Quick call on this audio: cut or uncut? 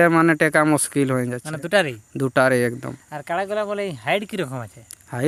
uncut